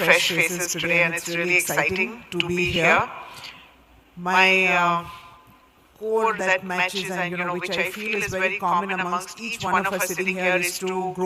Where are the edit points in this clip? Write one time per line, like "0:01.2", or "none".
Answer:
none